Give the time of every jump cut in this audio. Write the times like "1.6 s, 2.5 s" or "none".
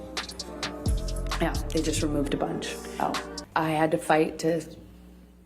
3.5 s